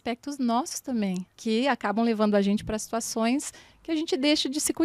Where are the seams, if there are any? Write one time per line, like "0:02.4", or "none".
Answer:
0:01.3

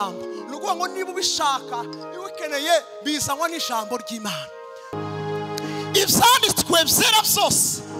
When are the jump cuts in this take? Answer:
0:04.9

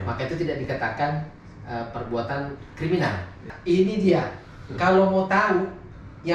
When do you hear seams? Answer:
0:03.5

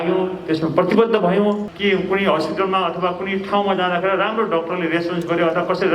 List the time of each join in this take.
0:01.7

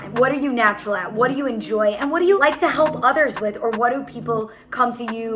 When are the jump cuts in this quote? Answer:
none

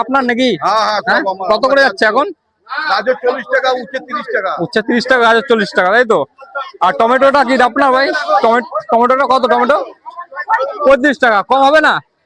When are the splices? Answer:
none

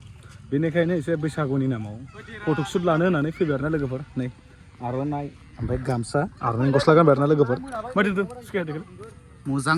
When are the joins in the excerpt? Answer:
none

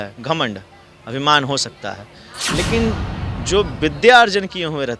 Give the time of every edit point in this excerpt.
none

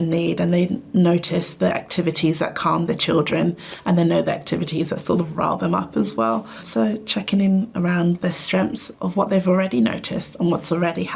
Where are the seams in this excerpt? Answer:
none

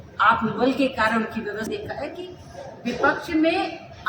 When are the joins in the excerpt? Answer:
0:01.7

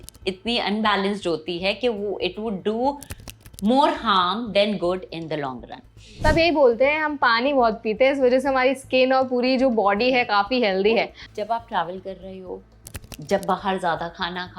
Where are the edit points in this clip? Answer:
0:06.0
0:11.2

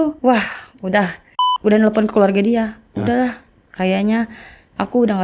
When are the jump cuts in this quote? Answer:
0:01.3

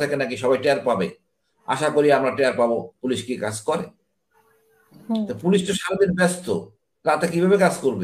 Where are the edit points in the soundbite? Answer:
none

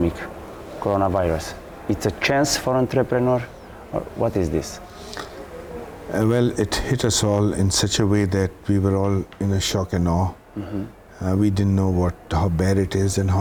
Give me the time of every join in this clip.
none

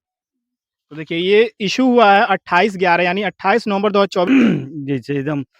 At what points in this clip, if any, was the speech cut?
0:04.3

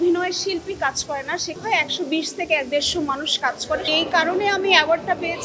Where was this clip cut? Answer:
0:01.6
0:03.8

